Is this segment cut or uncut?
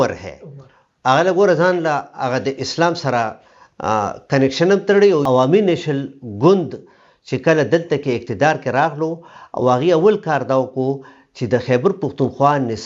cut